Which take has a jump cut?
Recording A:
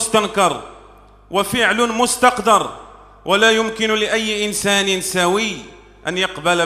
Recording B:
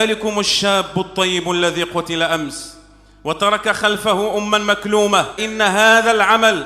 B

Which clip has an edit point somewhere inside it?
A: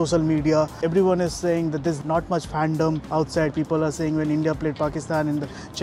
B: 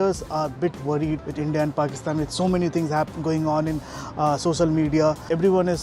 B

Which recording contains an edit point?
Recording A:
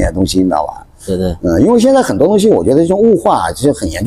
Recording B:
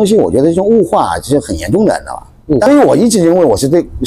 B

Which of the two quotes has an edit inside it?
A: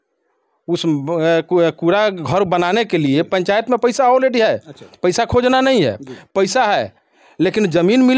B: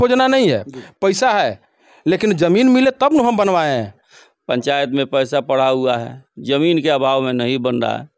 B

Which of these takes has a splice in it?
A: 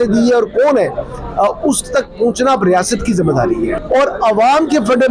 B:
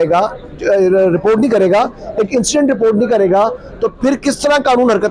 A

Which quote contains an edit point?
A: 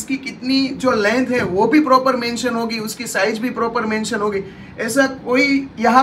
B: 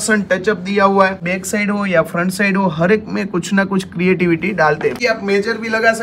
B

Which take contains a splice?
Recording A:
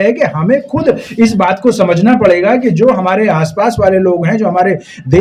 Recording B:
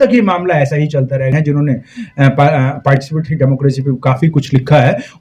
B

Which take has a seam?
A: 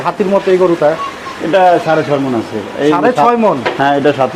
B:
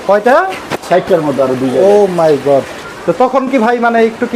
B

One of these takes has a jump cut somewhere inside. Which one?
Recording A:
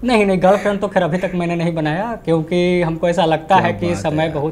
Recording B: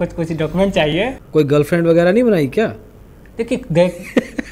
B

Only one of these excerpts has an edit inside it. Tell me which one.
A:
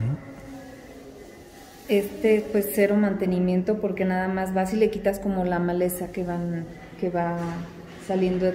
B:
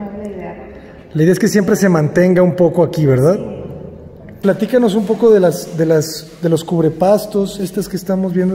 B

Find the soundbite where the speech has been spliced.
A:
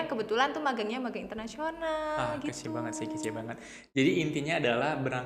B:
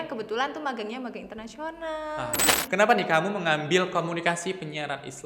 B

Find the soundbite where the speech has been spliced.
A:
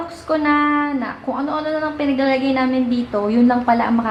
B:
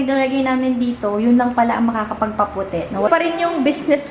B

